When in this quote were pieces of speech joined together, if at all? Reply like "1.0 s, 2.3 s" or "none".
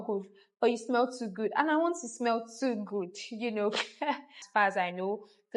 4.4 s